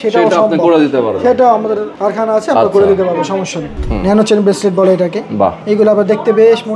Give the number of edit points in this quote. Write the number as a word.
three